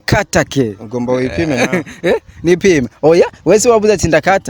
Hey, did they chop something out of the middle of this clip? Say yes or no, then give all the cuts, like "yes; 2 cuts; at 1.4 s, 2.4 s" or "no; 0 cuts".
no; 0 cuts